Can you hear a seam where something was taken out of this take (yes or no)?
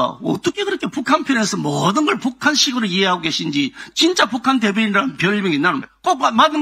no